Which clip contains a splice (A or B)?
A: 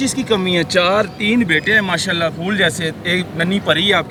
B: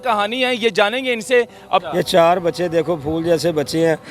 B